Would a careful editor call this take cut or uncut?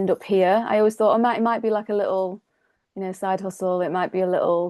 uncut